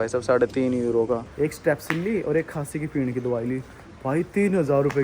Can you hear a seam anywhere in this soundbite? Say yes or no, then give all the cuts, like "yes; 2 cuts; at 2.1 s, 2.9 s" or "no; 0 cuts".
yes; 1 cut; at 1.3 s